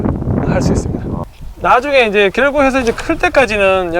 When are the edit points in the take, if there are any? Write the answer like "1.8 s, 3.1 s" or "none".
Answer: 1.1 s